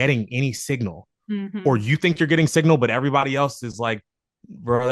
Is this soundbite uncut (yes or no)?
yes